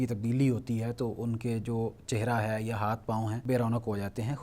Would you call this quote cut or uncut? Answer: cut